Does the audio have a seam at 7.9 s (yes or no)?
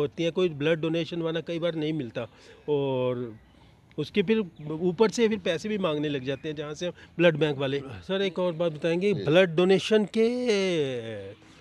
yes